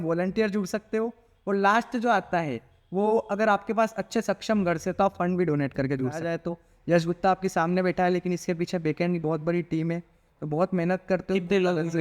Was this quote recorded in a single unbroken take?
no; 1 cut; at 6.2 s

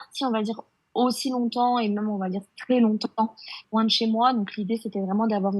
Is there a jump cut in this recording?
yes; 1 cut; at 3.6 s

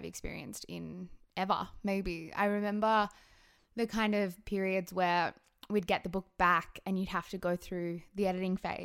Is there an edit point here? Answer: no; 0 cuts

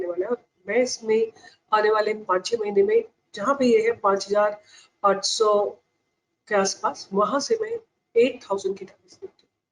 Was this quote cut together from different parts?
no; 0 cuts

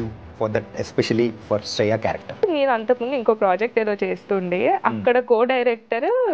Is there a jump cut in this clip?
yes; 1 cut; at 2.4 s

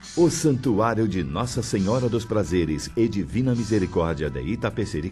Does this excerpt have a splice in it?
no; 0 cuts

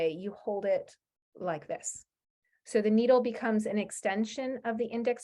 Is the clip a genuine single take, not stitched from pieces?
yes; 0 cuts

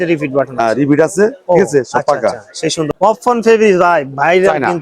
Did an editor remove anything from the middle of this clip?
yes; 1 cut; at 2.9 s

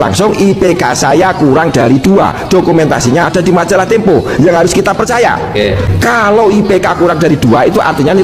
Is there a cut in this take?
yes; 1 cut; at 5.9 s

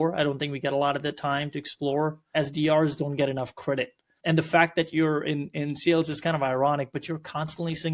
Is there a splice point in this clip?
yes; 1 cut; at 2.3 s

